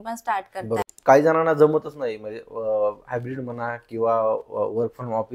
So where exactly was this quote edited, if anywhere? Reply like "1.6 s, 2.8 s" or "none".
0.9 s